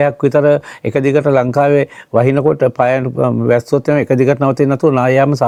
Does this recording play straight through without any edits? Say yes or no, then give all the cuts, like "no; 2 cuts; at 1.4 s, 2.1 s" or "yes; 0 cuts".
yes; 0 cuts